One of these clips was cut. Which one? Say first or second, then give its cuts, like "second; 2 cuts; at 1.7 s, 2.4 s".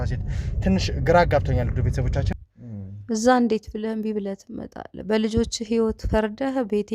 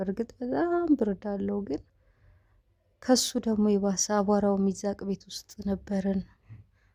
first; 1 cut; at 2.3 s